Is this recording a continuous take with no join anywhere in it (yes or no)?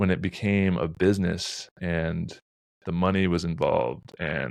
yes